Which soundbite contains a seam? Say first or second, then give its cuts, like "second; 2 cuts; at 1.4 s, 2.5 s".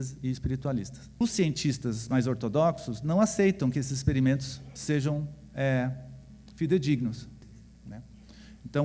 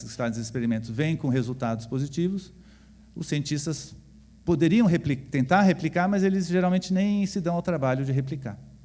first; 2 cuts; at 1.2 s, 7.3 s